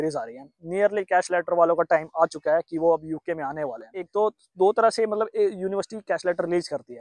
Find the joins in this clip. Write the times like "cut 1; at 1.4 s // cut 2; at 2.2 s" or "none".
cut 1; at 4.0 s